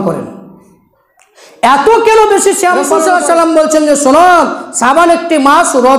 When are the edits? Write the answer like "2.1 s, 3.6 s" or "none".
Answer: 2.9 s